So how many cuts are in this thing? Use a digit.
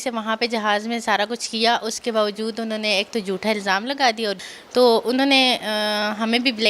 1